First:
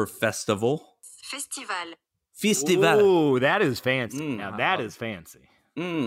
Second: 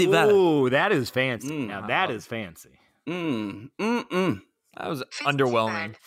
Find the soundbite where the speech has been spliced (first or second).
first